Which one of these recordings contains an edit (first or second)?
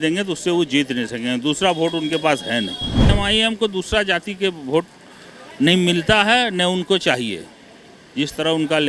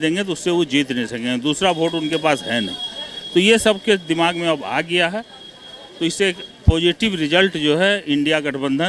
first